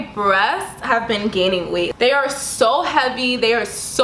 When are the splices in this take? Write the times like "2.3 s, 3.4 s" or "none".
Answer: 1.9 s